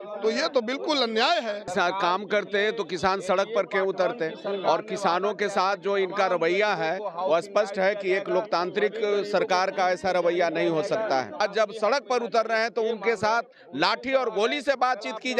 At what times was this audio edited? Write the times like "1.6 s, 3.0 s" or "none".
1.6 s, 11.4 s